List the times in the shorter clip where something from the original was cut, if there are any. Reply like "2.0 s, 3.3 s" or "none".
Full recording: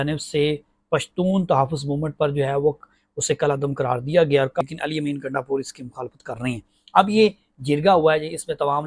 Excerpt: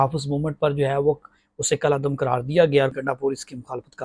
2.9 s